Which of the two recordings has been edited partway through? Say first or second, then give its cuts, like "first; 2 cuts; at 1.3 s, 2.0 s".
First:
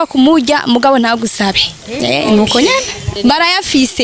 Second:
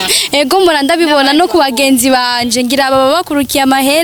first; 1 cut; at 3.0 s